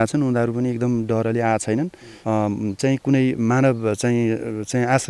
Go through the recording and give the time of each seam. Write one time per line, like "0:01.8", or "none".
0:02.1